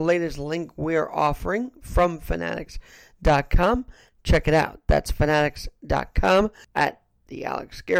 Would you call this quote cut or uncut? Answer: cut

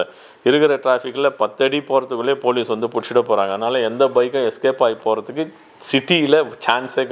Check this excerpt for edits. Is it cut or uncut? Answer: uncut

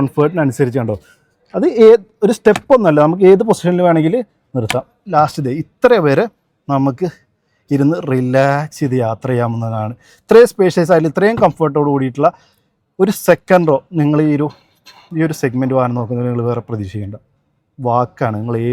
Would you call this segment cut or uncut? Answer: uncut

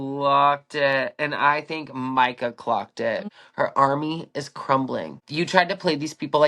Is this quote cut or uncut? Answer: cut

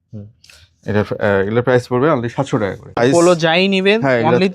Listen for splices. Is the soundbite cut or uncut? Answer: cut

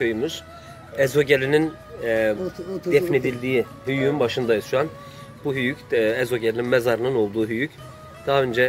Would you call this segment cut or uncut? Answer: uncut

